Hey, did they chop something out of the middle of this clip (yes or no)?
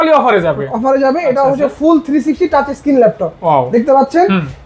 no